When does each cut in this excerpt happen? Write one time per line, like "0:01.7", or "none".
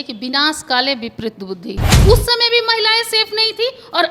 0:01.9